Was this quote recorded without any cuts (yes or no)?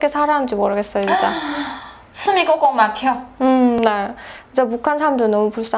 yes